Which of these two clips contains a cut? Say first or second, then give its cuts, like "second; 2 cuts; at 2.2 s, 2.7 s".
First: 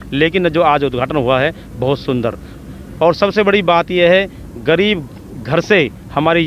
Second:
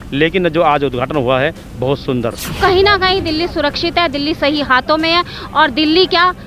second; 1 cut; at 2.6 s